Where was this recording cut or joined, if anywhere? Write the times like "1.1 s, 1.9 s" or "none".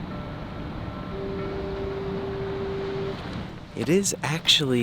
3.6 s